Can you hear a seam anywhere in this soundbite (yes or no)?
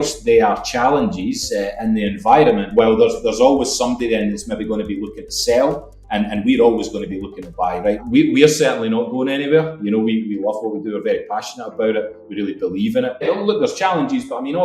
yes